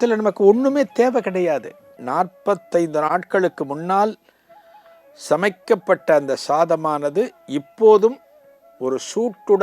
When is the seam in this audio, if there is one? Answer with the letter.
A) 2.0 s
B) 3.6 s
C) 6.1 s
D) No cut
A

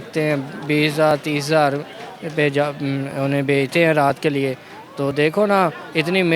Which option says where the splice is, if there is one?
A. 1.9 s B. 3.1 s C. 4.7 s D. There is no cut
D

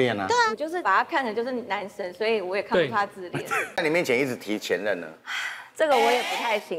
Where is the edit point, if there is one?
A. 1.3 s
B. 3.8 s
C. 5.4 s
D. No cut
B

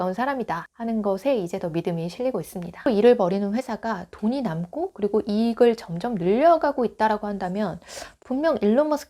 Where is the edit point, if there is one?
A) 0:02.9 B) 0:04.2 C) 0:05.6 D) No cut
A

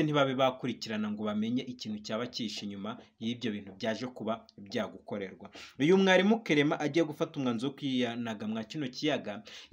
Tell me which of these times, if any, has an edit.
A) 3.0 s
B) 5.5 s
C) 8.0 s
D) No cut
D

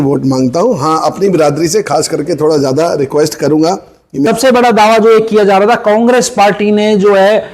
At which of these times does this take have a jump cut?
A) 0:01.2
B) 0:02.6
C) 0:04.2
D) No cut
C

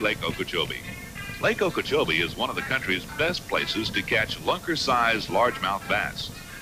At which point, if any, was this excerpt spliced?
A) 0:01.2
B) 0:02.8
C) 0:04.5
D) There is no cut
A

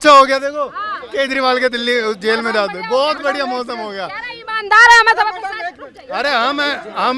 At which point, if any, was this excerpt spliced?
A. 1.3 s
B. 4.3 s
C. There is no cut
C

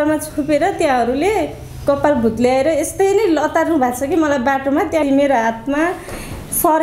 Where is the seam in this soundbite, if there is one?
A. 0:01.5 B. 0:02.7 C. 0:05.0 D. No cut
C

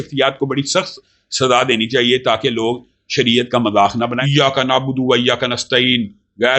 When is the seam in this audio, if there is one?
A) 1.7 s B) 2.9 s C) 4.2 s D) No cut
C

